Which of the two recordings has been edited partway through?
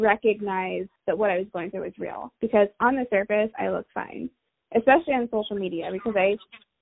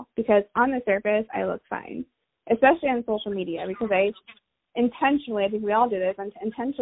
first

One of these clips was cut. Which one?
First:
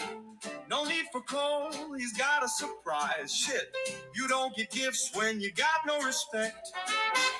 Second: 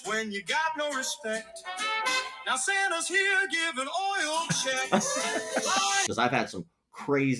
second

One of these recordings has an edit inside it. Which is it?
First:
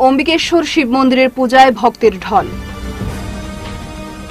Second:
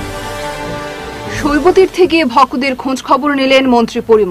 second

